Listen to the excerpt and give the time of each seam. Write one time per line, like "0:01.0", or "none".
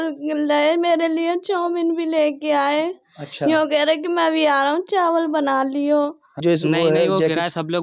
0:06.2